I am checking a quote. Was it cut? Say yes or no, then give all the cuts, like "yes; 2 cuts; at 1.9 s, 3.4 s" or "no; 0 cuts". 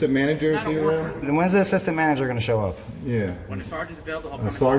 yes; 1 cut; at 1.2 s